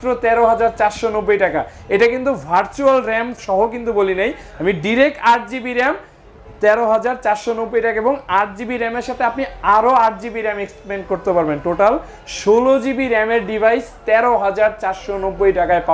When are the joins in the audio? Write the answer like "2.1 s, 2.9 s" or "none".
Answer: 3.4 s

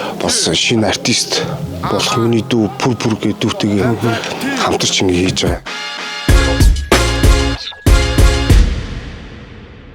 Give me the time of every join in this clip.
5.8 s

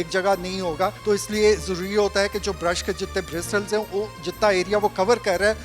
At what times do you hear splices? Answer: 1.0 s

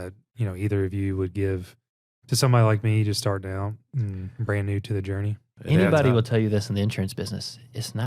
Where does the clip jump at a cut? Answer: 5.5 s

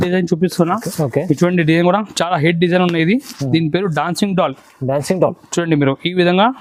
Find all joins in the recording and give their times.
none

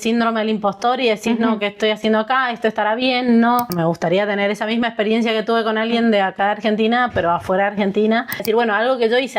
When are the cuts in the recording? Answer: 3.7 s, 8.4 s

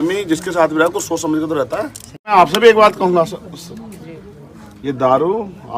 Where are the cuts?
2.3 s

